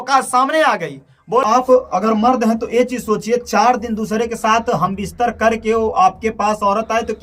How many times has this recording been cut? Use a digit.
1